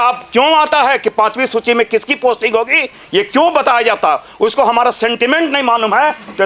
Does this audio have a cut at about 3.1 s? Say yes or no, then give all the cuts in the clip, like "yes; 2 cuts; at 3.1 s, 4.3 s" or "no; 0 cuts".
no; 0 cuts